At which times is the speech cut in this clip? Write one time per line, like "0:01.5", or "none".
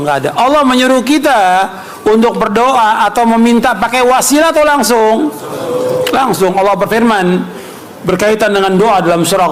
none